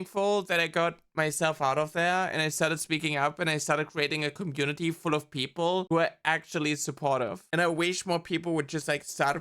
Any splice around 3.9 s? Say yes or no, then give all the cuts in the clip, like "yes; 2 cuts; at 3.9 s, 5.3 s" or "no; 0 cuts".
no; 2 cuts; at 5.9 s, 7.4 s